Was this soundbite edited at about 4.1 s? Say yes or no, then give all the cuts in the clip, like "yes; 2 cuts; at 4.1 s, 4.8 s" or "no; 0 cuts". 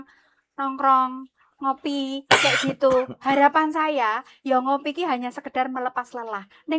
no; 0 cuts